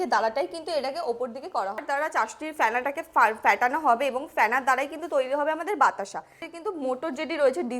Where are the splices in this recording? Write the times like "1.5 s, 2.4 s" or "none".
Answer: 1.8 s, 6.5 s